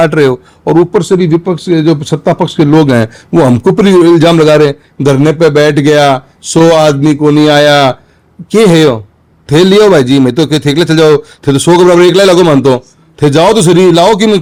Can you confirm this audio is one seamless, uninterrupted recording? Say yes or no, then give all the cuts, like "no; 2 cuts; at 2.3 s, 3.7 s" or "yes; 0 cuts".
yes; 0 cuts